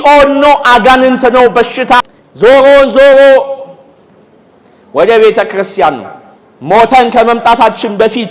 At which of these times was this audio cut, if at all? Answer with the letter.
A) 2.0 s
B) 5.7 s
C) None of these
A